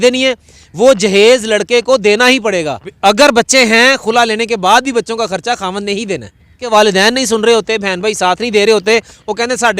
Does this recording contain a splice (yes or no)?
yes